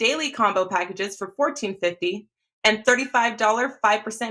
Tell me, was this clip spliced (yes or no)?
no